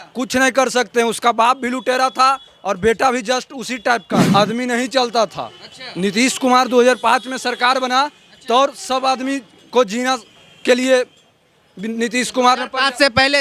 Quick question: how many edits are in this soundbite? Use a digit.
1